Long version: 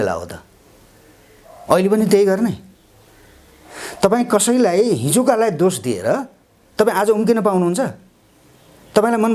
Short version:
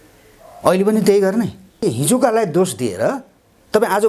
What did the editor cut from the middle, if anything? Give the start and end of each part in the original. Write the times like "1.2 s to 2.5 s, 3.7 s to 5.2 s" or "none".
2.9 s to 4.9 s

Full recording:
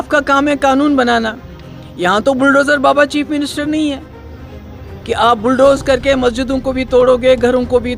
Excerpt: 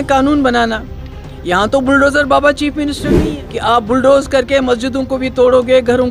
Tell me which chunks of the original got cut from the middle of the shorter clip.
3.8 s to 4.8 s

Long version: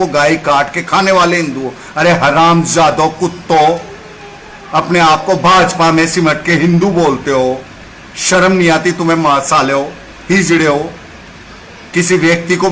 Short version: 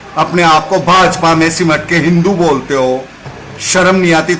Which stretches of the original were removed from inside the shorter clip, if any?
none

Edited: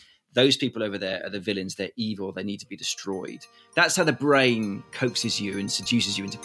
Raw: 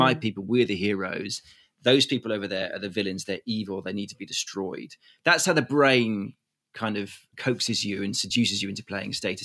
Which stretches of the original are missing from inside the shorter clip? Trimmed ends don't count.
6.3 s to 7.3 s

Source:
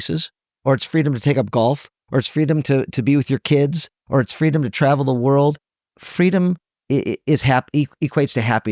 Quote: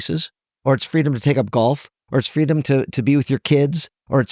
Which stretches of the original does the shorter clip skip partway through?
none

